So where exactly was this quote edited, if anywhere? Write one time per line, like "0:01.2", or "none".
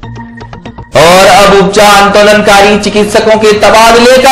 0:00.9